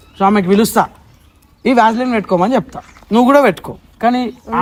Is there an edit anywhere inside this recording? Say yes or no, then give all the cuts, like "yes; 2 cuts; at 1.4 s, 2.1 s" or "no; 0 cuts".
no; 0 cuts